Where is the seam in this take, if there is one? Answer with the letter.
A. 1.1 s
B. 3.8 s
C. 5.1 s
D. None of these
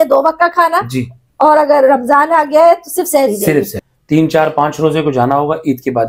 B